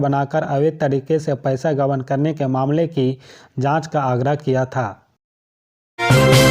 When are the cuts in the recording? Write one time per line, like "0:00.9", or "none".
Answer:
0:05.3